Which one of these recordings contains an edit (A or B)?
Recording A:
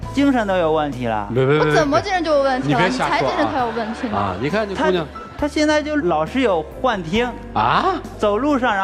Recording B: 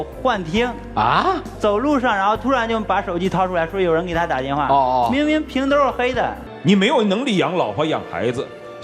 B